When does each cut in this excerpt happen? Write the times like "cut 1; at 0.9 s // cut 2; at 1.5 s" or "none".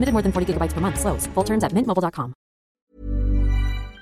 cut 1; at 2.8 s